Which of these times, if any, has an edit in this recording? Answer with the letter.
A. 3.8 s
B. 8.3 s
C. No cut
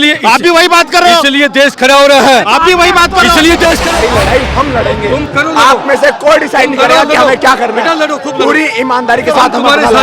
A